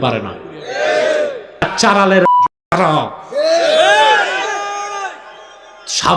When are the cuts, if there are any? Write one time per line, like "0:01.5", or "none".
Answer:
0:01.7